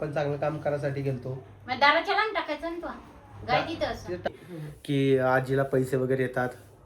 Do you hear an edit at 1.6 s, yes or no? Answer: no